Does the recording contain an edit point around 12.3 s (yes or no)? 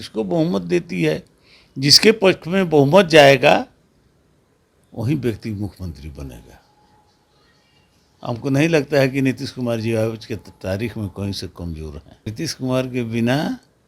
yes